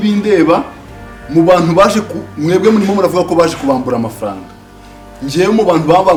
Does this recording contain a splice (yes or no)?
no